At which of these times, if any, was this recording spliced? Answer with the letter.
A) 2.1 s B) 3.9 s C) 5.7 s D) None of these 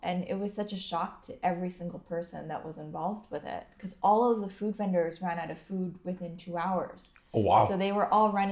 D